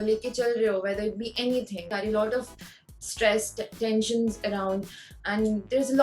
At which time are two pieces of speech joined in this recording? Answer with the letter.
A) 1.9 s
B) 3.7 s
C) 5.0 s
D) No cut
A